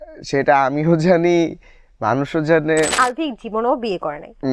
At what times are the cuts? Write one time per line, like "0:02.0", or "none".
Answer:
0:03.0

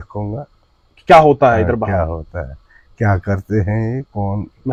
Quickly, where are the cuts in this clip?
none

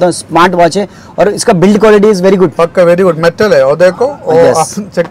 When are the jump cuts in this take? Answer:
none

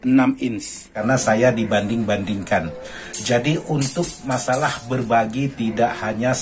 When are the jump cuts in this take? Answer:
0:01.0

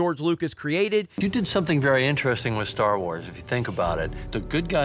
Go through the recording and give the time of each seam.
0:01.2

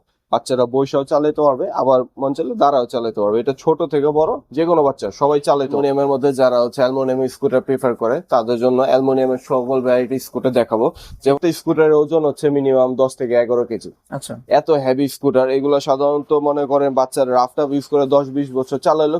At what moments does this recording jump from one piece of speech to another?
0:05.7
0:11.4

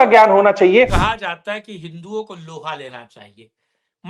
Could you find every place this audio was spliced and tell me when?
0:01.0

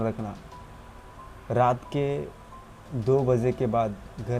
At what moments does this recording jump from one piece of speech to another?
none

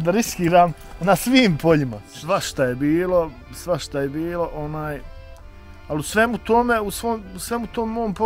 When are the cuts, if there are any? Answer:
0:02.1

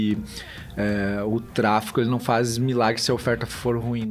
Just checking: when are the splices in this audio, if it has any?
none

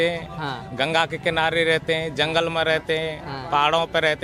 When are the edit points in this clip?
none

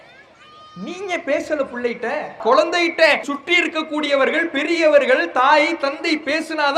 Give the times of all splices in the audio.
0:02.4
0:03.3

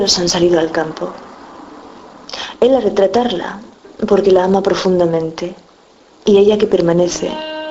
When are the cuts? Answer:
0:02.4

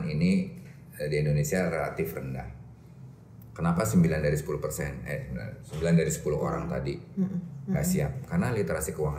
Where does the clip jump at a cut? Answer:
none

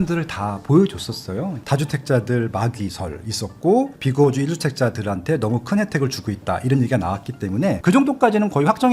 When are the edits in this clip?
0:01.6
0:07.8

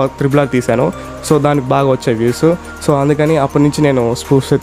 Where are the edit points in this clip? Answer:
none

